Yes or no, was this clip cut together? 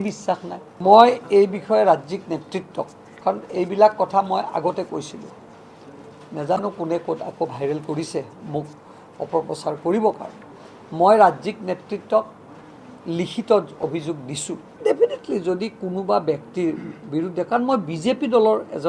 yes